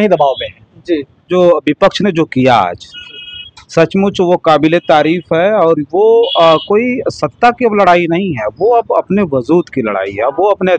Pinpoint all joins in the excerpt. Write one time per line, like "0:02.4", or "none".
0:01.3